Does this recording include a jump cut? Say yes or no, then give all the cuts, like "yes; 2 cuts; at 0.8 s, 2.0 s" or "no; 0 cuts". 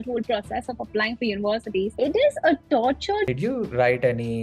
yes; 2 cuts; at 1.9 s, 3.3 s